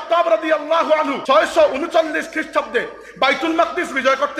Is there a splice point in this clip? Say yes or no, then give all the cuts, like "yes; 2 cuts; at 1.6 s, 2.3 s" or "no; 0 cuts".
yes; 1 cut; at 1.2 s